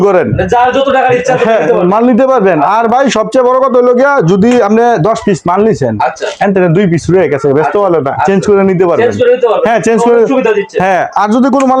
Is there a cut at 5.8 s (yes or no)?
no